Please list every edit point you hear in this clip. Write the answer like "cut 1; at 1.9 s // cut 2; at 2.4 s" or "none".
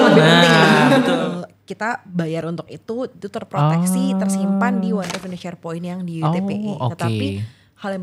cut 1; at 1.2 s